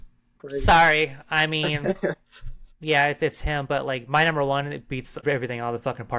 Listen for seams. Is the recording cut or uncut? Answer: cut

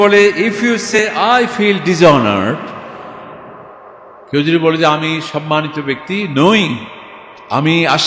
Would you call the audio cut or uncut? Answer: cut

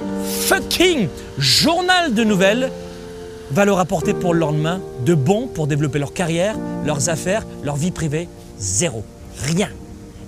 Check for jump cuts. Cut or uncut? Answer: uncut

